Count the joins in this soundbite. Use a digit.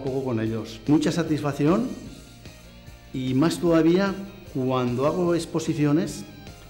0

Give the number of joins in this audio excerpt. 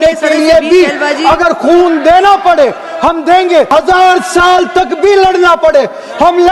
1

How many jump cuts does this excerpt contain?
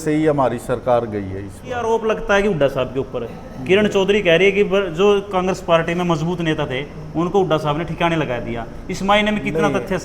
1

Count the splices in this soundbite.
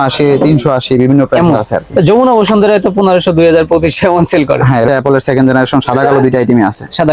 1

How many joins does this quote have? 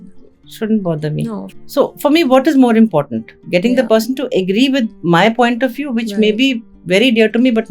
1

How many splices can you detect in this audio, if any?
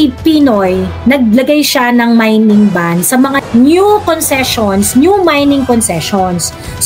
1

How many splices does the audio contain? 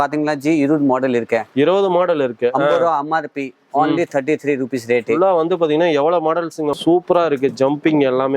1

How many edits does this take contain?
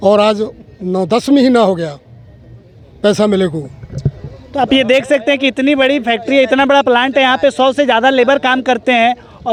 0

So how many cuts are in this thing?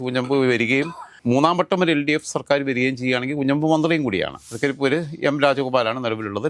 1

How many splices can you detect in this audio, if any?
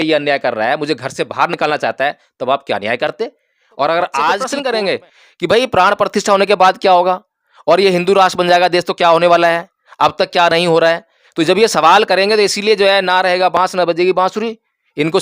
1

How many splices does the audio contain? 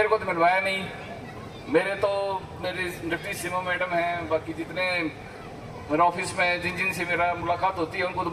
0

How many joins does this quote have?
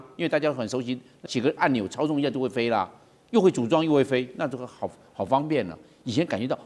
1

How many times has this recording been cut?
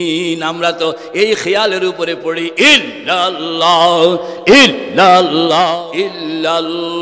1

